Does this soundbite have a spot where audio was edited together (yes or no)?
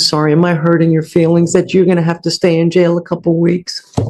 no